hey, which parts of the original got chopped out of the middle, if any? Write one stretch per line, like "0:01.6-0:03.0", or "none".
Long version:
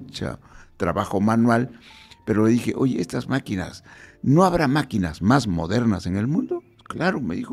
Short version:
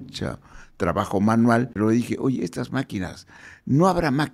0:01.7-0:02.3